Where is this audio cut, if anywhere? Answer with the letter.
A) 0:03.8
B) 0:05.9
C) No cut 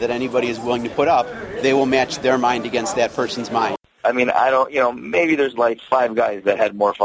A